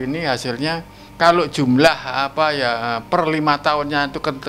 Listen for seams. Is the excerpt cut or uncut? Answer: cut